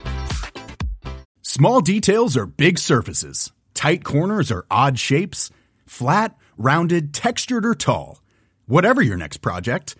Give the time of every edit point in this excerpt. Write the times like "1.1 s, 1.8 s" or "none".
1.3 s